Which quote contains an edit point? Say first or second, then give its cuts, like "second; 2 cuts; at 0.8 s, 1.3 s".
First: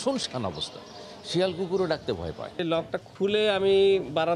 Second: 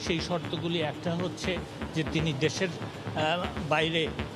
first; 1 cut; at 2.6 s